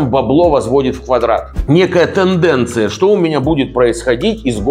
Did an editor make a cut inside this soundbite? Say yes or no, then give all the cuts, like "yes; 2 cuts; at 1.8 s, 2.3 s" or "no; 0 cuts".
yes; 1 cut; at 1.5 s